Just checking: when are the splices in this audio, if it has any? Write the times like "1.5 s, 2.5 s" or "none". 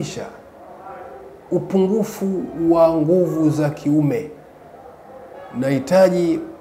none